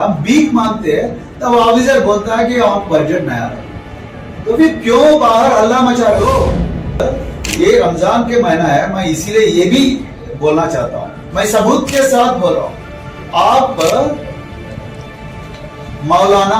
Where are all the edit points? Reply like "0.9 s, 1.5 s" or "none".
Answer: 7.0 s